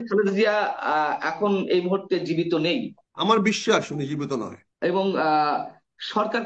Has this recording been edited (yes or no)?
yes